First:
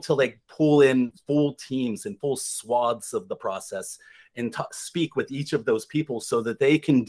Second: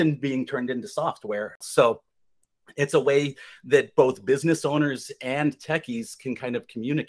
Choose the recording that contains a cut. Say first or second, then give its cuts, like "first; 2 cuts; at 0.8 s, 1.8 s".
second; 1 cut; at 1.6 s